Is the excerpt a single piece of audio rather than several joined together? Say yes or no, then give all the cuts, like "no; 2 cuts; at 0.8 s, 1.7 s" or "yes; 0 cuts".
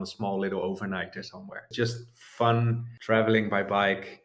no; 2 cuts; at 1.7 s, 2.9 s